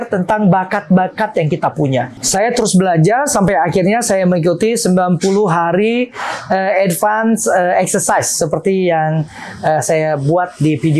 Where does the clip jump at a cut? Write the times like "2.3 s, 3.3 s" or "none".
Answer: 2.3 s